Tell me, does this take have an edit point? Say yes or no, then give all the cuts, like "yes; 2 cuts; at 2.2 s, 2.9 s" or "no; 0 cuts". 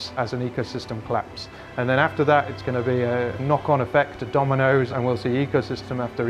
yes; 2 cuts; at 3.4 s, 4.9 s